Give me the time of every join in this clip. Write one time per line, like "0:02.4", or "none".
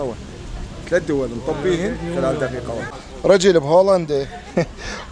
0:02.9